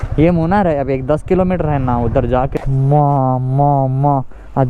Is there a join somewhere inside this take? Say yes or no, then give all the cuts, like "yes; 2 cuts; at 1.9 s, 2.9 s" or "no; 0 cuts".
yes; 1 cut; at 2.5 s